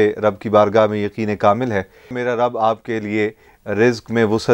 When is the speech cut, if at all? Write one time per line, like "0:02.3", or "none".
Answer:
0:02.2